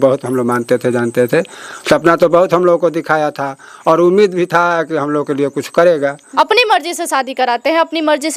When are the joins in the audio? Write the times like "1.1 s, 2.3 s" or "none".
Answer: 6.2 s

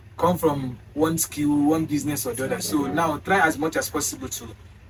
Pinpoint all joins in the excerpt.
none

